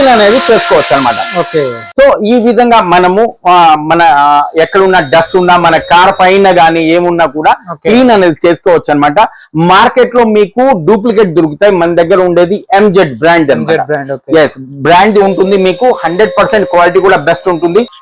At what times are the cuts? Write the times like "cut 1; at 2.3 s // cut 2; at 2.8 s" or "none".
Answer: none